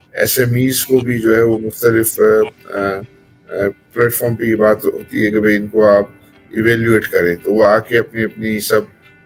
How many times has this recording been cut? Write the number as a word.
zero